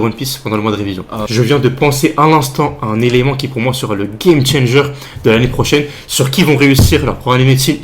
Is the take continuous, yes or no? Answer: no